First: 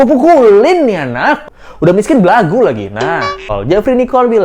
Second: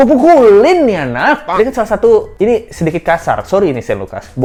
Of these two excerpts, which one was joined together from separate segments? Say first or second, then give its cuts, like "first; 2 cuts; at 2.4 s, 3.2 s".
first; 2 cuts; at 1.5 s, 3.5 s